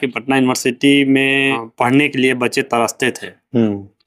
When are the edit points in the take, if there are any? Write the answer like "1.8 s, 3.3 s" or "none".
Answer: 1.6 s

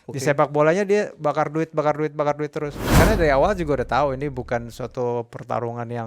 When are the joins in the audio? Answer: 2.9 s

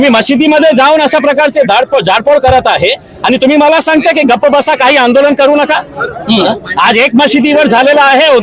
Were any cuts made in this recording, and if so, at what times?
none

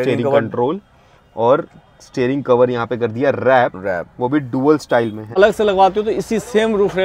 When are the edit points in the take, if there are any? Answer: 5.4 s

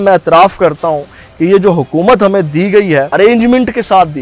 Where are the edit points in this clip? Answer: 3.1 s

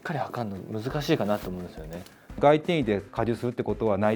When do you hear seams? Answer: 2.4 s, 3.1 s

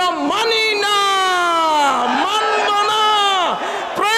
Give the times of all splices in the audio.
none

